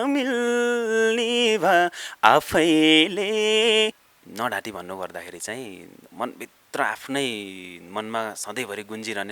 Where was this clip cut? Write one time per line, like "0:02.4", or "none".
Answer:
0:04.0